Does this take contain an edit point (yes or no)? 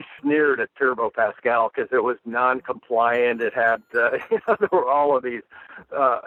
no